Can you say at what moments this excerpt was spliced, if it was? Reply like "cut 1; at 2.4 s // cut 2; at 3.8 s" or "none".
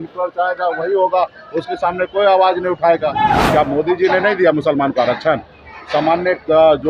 cut 1; at 3.4 s